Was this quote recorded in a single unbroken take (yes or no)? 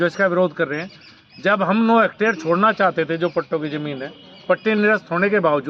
yes